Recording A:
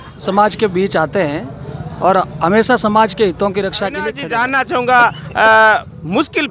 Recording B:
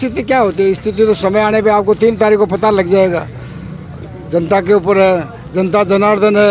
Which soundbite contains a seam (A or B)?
A